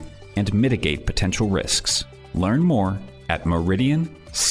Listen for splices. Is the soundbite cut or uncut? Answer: uncut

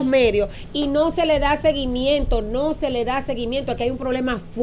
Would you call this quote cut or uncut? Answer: uncut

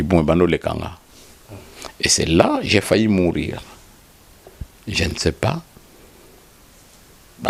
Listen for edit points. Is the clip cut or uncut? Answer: uncut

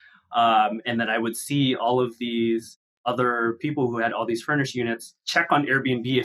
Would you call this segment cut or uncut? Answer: cut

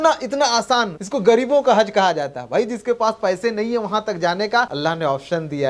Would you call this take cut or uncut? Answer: cut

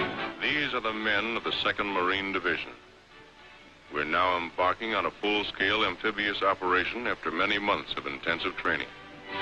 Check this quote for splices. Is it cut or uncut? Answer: cut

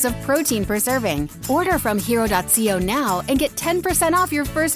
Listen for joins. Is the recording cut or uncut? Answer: cut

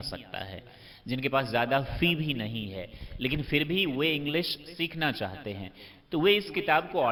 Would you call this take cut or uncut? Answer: uncut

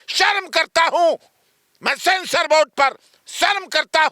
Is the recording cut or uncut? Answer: uncut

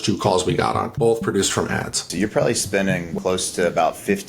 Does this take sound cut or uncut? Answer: cut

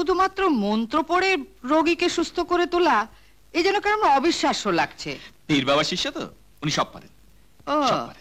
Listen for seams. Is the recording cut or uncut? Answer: uncut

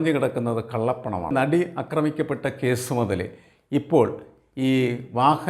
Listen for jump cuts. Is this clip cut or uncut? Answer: cut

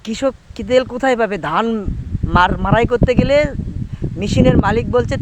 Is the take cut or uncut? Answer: uncut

